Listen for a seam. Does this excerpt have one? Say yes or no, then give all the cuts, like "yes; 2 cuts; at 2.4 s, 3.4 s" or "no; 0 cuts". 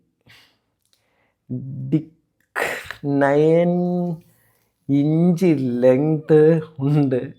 no; 0 cuts